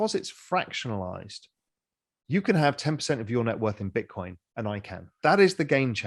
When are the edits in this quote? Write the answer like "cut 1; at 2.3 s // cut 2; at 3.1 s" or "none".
cut 1; at 5.1 s